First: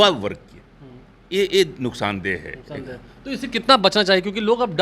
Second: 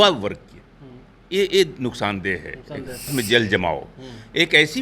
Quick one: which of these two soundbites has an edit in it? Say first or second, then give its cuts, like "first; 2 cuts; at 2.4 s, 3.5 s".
second; 1 cut; at 3.1 s